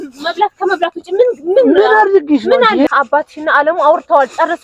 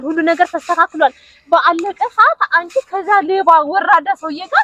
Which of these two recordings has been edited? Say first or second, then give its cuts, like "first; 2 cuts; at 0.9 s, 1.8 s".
first; 1 cut; at 2.9 s